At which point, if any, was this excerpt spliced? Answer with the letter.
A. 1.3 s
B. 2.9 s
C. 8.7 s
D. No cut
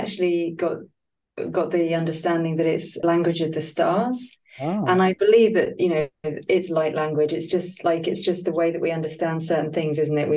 B